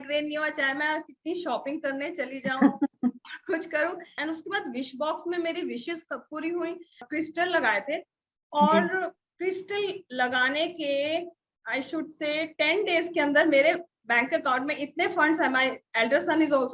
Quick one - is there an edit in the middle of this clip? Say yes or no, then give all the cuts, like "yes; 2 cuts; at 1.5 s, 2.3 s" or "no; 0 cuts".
yes; 2 cuts; at 4.1 s, 7.1 s